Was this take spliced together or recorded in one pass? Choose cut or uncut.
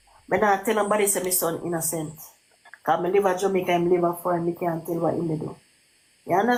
uncut